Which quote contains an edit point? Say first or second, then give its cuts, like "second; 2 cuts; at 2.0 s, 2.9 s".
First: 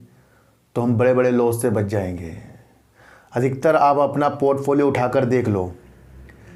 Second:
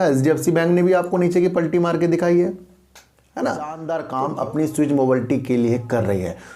second; 1 cut; at 4.0 s